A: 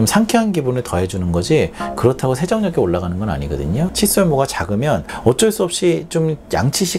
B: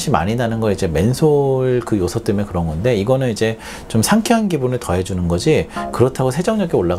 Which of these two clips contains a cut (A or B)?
A